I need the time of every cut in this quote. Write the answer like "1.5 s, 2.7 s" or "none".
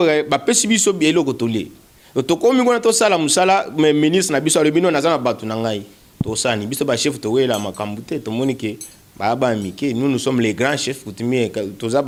none